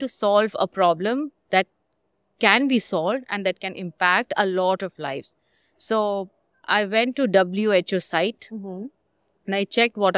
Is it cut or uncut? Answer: uncut